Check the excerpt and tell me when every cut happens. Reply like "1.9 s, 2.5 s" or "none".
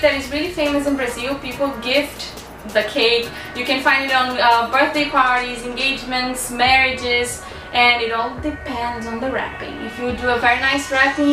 6.3 s